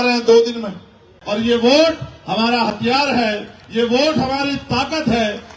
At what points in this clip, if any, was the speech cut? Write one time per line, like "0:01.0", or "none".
0:01.1